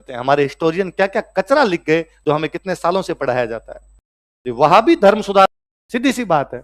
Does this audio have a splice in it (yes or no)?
yes